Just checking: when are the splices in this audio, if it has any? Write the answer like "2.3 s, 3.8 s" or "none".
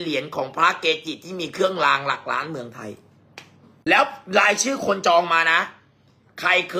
3.7 s